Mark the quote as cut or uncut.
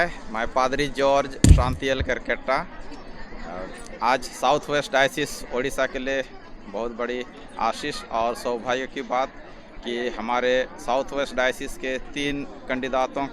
uncut